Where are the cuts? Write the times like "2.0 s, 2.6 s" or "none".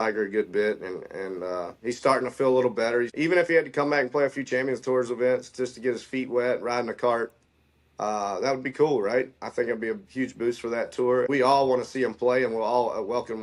3.1 s, 11.3 s